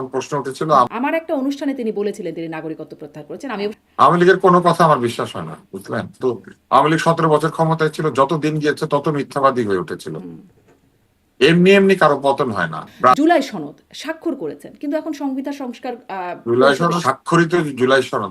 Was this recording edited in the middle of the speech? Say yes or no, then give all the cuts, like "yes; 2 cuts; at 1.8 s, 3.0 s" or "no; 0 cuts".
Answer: yes; 5 cuts; at 0.9 s, 3.8 s, 6.2 s, 13.2 s, 17.0 s